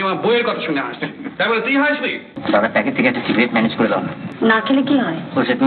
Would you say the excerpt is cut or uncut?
cut